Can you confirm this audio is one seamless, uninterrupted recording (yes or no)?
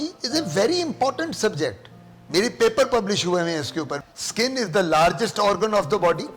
no